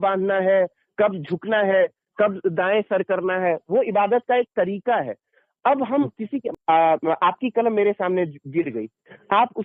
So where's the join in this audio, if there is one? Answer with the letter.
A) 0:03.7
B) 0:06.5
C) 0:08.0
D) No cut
B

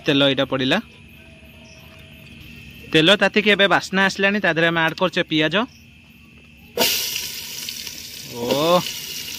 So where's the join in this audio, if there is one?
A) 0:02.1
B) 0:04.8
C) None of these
C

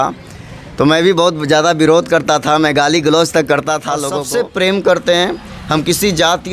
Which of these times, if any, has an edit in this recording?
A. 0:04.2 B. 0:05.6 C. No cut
A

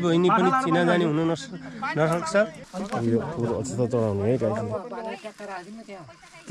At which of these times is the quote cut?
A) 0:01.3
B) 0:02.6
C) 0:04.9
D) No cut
B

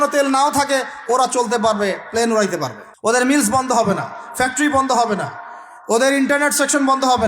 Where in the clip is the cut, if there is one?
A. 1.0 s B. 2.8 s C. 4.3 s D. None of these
B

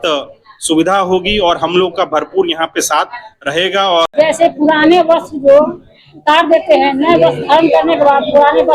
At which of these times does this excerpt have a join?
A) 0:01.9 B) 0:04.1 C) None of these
B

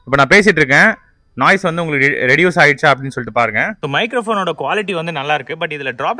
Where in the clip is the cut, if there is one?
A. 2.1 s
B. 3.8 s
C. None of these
B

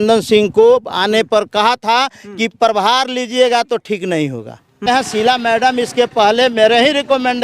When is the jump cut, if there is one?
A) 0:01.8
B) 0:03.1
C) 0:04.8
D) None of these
C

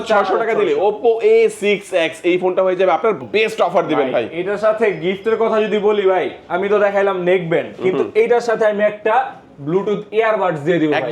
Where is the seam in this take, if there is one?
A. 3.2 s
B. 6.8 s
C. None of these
A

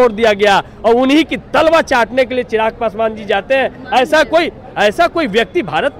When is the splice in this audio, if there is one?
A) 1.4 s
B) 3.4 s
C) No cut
C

